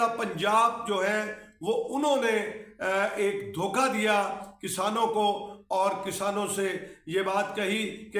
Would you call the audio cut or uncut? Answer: uncut